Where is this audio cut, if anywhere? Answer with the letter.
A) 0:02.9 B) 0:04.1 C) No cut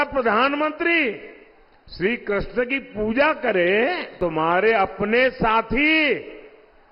B